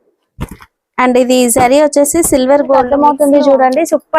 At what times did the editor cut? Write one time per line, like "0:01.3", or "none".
0:02.9